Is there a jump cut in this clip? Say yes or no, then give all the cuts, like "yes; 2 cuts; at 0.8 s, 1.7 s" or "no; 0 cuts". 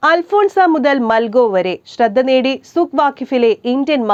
no; 0 cuts